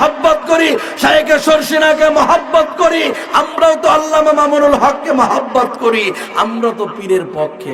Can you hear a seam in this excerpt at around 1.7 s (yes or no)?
no